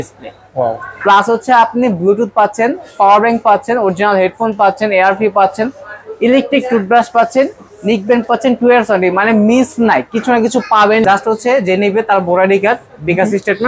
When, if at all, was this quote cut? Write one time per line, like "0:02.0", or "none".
0:11.0